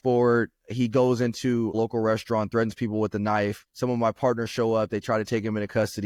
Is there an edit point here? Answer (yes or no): no